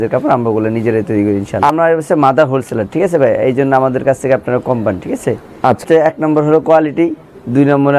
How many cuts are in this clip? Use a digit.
2